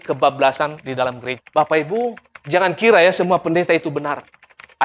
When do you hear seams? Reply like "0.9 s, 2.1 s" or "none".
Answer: 1.5 s